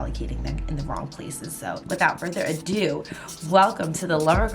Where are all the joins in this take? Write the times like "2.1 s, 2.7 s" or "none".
1.8 s